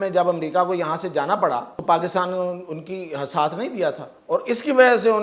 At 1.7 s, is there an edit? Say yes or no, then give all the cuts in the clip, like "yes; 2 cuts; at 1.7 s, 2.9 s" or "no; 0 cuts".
yes; 2 cuts; at 1.7 s, 4.1 s